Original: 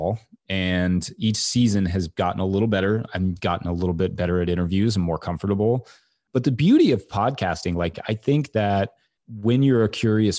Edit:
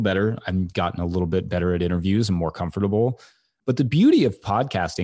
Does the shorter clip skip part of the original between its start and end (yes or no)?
no